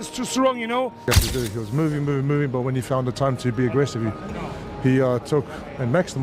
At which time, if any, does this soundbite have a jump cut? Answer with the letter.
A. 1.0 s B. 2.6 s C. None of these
A